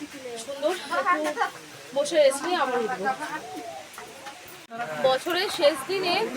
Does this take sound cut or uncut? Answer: cut